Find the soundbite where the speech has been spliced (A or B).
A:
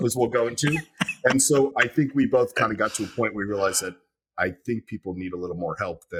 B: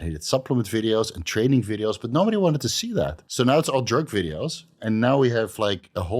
B